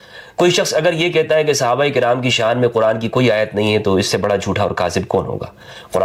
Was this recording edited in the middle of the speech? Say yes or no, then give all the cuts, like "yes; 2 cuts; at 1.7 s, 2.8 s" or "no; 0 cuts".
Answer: no; 0 cuts